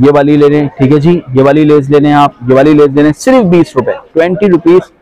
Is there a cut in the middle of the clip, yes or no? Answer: no